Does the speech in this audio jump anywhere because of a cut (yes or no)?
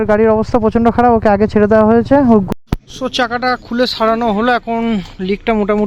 yes